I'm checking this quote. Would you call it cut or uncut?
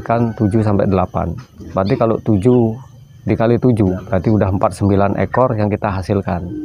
cut